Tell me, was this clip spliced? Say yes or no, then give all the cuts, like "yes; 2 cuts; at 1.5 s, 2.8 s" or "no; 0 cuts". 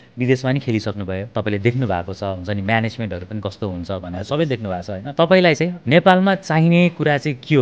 yes; 3 cuts; at 1.2 s, 5.0 s, 5.8 s